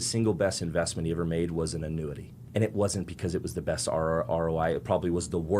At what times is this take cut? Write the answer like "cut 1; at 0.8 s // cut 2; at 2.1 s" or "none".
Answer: cut 1; at 2.4 s